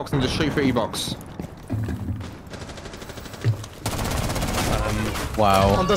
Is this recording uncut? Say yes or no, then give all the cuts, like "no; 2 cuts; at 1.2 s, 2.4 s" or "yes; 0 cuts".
yes; 0 cuts